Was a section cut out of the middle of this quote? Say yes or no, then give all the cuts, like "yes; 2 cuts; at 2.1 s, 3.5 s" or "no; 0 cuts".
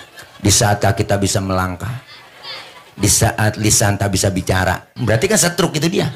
no; 0 cuts